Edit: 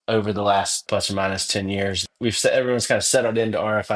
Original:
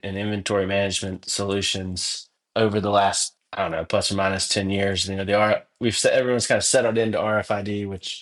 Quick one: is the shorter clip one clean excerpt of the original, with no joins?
no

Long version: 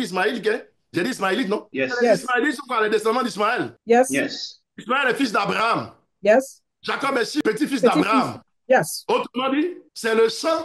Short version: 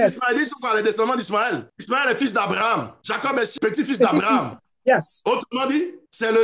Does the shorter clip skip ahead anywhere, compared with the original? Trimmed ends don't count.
yes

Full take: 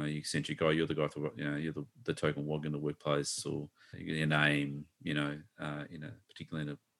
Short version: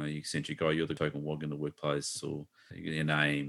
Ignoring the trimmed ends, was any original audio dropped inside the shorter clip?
yes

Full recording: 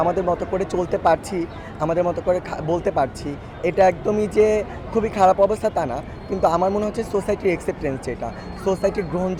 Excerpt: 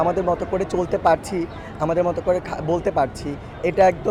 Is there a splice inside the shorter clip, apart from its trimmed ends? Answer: no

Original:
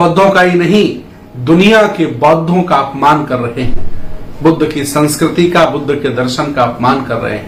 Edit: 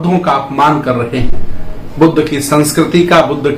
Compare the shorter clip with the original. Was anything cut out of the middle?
no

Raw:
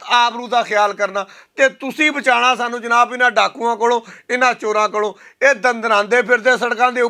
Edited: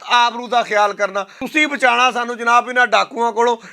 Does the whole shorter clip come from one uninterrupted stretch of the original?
no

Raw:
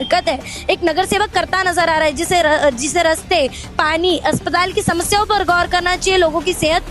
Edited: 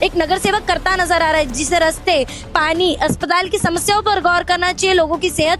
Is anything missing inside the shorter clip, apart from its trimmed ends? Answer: yes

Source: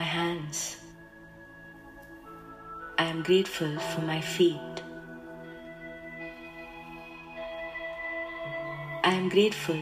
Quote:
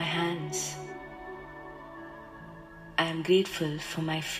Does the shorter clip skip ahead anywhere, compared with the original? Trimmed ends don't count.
no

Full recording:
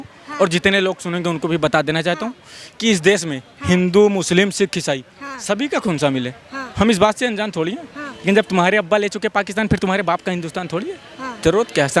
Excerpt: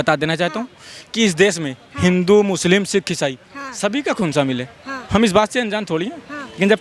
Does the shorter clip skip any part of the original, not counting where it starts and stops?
no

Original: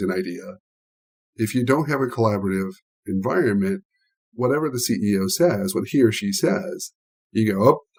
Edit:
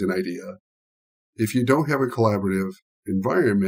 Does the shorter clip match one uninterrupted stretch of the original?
yes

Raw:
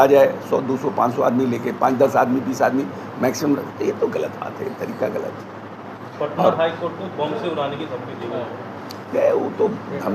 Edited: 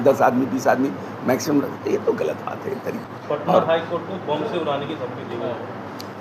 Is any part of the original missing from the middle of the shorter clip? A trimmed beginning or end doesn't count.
yes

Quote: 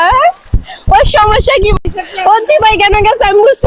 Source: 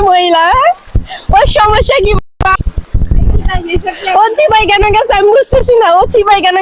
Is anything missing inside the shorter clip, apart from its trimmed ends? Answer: yes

